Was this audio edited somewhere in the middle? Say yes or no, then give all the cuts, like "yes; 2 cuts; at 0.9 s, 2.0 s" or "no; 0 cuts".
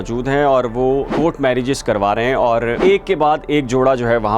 yes; 2 cuts; at 1.1 s, 2.7 s